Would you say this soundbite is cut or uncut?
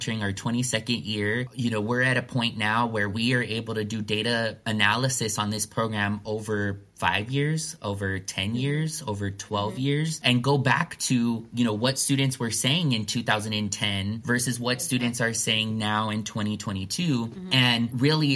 uncut